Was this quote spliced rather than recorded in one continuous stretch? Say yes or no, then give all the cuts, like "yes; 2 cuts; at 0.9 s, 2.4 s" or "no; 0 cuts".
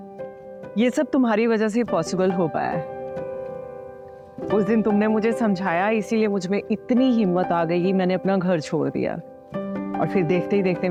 no; 0 cuts